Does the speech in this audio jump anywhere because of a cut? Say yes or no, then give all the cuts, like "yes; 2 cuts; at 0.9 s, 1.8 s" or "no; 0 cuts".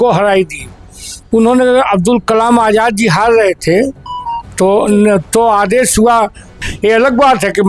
yes; 1 cut; at 6.6 s